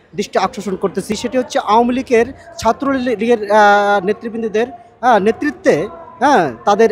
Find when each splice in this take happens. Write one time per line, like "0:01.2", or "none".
0:01.1